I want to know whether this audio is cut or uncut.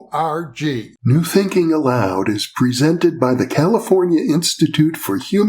cut